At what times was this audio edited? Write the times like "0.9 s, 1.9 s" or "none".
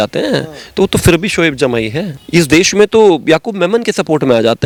none